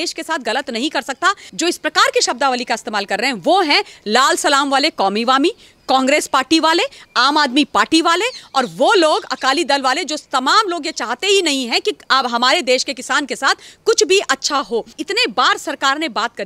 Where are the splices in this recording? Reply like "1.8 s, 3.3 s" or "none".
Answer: 1.4 s, 15.0 s